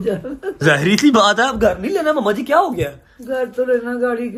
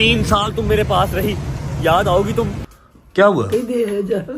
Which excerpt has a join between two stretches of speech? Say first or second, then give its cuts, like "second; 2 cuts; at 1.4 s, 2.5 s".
second; 1 cut; at 2.7 s